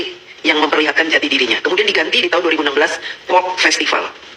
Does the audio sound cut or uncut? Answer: uncut